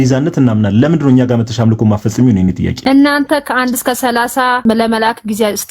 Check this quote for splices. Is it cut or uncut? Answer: cut